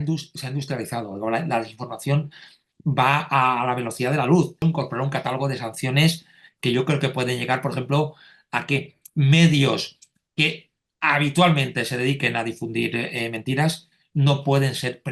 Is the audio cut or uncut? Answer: cut